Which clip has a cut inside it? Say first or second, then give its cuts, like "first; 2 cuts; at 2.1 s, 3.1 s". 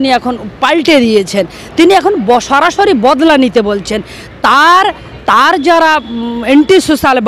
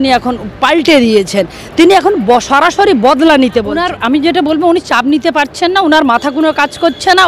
second; 1 cut; at 3.9 s